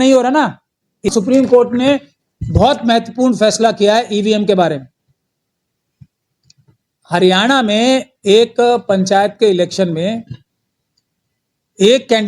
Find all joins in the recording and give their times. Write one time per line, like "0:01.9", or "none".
0:01.1